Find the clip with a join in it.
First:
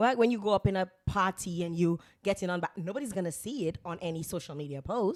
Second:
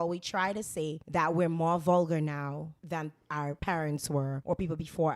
second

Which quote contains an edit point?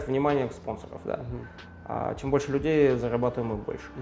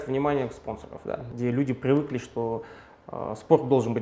second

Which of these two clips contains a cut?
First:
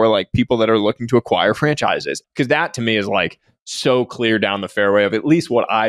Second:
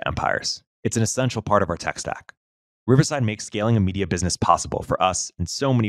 first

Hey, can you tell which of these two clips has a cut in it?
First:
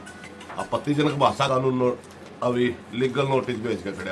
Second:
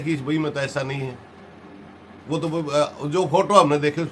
first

